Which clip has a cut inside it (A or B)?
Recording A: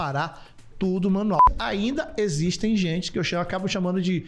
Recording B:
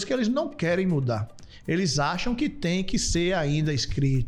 A